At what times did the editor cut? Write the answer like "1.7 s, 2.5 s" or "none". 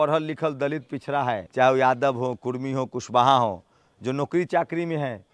1.5 s